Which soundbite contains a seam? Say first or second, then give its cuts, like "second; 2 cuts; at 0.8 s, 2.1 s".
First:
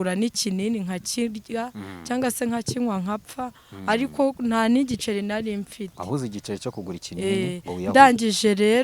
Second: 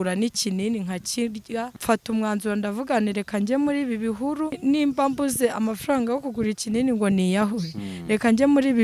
second; 2 cuts; at 1.8 s, 4.6 s